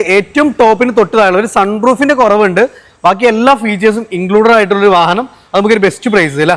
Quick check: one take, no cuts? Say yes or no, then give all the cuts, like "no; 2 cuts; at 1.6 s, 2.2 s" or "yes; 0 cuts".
yes; 0 cuts